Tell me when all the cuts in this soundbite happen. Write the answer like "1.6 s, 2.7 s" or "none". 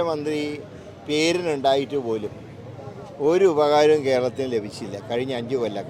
none